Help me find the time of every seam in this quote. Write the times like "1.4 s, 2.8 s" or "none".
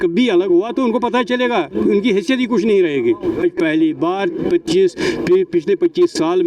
3.4 s